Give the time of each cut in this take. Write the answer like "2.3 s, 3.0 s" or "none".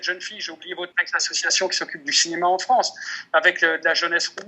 0.9 s

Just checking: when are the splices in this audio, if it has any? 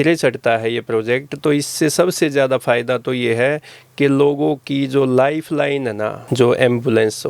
none

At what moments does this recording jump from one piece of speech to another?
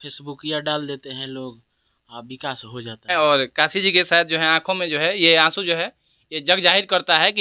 3.1 s

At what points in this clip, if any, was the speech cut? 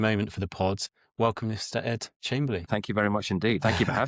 0.9 s, 2.7 s

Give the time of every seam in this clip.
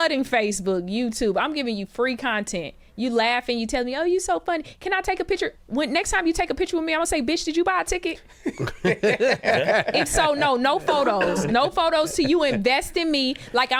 none

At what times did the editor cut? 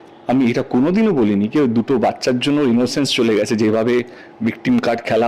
none

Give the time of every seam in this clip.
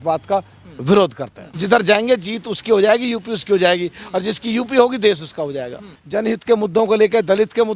1.5 s, 5.9 s

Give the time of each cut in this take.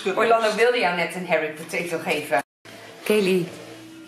2.4 s

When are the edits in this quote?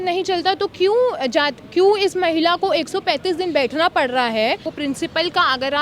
4.7 s

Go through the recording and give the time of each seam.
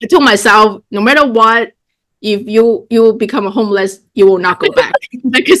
none

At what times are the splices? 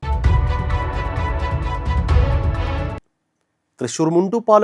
3.0 s

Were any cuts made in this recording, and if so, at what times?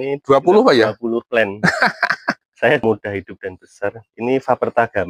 2.8 s

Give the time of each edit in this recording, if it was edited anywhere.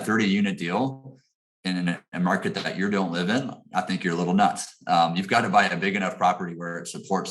none

